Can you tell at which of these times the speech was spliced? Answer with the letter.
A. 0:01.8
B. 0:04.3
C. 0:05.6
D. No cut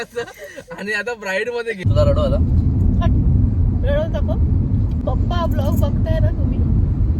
A